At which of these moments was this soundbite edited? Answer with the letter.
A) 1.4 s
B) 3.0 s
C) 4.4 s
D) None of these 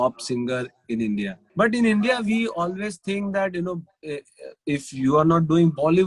A